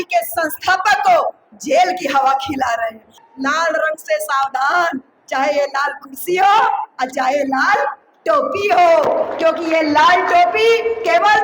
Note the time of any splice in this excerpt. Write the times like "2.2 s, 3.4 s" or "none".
3.2 s